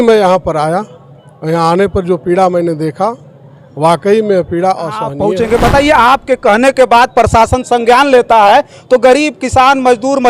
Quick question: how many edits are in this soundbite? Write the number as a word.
one